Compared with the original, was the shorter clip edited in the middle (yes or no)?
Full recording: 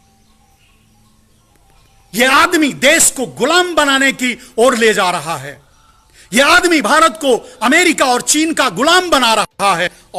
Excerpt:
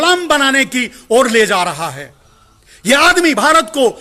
no